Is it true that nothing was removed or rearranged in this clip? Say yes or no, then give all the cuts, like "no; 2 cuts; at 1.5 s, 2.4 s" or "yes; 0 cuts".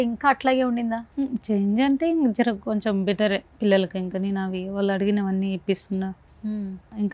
yes; 0 cuts